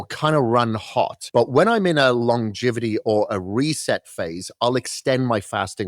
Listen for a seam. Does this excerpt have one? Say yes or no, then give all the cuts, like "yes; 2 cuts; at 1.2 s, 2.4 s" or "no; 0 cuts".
yes; 1 cut; at 1.2 s